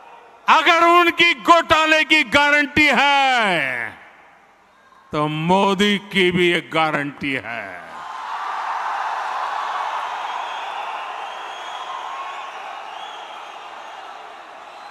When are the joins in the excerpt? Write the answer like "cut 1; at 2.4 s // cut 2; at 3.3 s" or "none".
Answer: none